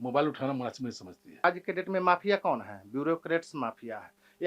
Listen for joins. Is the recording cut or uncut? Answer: cut